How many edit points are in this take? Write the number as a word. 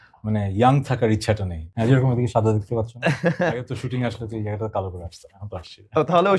one